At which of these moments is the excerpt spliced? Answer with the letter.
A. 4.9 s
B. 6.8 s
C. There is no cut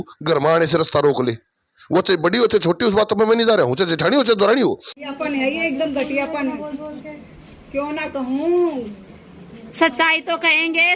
A